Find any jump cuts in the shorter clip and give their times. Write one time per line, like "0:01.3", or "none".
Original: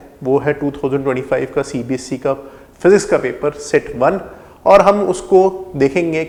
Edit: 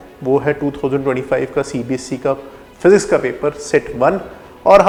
none